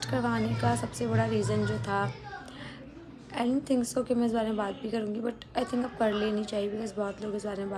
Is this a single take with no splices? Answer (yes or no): yes